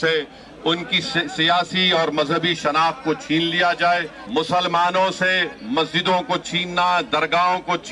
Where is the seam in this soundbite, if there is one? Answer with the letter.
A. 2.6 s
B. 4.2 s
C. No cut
B